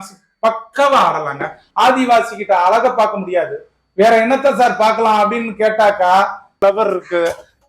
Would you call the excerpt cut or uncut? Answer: cut